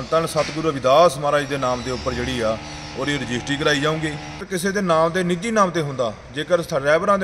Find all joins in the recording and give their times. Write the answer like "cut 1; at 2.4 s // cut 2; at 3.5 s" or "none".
cut 1; at 4.4 s